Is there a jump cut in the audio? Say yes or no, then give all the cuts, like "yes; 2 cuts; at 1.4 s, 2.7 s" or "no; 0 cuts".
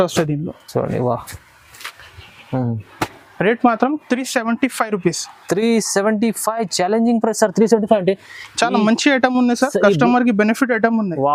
no; 0 cuts